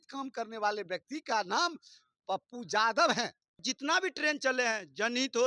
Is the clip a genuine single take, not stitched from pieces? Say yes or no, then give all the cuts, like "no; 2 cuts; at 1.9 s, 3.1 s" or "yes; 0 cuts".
no; 1 cut; at 3.7 s